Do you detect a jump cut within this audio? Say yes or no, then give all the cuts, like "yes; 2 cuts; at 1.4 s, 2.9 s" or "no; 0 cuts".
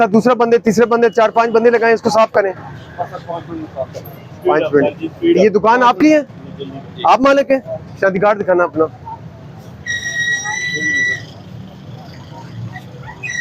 no; 0 cuts